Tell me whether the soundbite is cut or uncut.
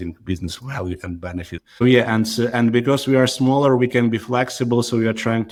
uncut